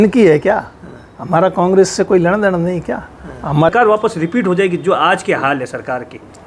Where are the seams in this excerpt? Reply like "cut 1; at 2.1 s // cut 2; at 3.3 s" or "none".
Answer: cut 1; at 3.7 s

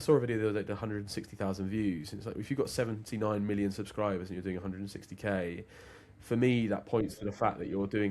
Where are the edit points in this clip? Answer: none

